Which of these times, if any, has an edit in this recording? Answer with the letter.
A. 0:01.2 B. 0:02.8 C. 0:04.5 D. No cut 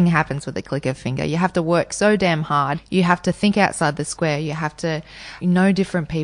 B